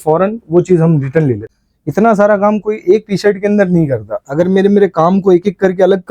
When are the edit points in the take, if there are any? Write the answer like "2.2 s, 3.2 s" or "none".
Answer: 1.5 s